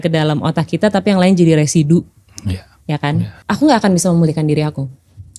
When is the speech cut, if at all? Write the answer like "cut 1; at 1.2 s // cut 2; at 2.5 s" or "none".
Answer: cut 1; at 3.4 s